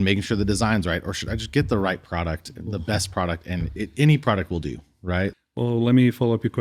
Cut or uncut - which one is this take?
cut